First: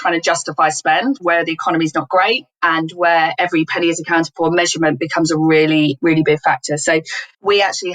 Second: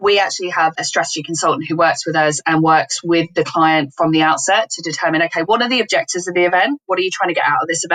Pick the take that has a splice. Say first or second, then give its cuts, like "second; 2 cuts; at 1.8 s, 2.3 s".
first; 2 cuts; at 1.2 s, 3.3 s